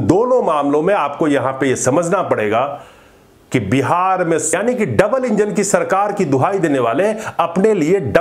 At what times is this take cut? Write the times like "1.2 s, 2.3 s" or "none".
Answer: 4.5 s